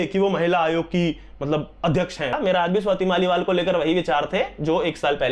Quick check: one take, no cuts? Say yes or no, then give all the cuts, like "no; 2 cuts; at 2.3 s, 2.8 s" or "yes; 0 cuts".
no; 1 cut; at 2.3 s